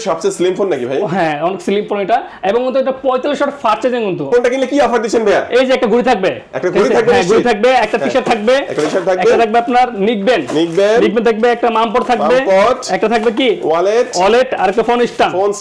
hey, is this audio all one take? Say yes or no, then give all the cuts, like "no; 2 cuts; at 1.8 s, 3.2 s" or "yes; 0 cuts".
no; 1 cut; at 4.3 s